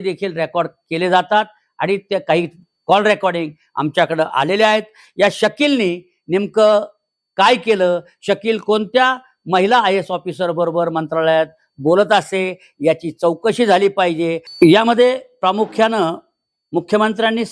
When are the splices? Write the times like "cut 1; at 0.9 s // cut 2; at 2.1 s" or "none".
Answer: cut 1; at 14.4 s